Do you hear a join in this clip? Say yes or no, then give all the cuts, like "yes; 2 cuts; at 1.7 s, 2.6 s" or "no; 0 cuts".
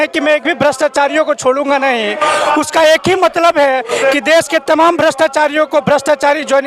no; 0 cuts